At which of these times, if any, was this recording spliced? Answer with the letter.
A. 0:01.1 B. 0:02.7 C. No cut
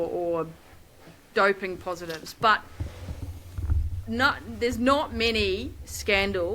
A